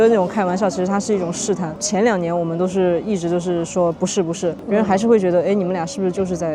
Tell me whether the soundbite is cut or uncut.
uncut